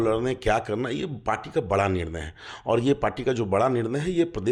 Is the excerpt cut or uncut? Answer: uncut